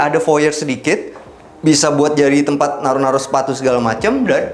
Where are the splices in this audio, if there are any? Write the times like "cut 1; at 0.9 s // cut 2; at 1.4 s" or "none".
none